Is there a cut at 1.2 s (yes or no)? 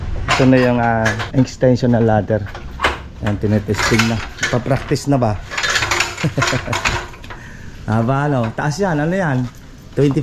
yes